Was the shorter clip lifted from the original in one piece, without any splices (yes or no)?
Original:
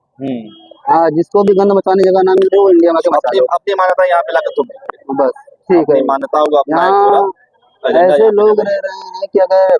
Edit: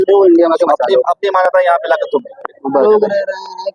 no